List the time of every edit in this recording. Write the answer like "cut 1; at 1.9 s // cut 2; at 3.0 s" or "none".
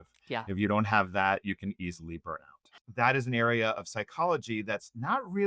cut 1; at 2.8 s